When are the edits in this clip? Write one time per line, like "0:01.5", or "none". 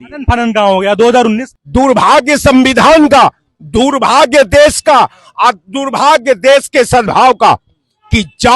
0:01.5